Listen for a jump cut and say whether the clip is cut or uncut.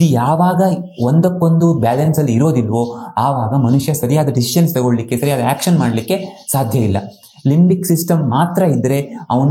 uncut